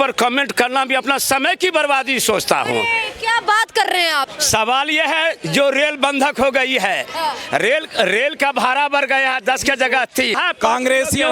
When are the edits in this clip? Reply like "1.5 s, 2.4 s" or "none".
4.3 s, 10.4 s